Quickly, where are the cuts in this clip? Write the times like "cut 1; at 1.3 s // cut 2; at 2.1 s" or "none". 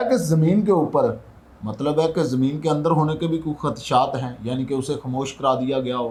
none